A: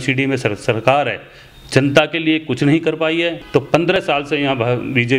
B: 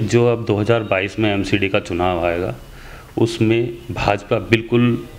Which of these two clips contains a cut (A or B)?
A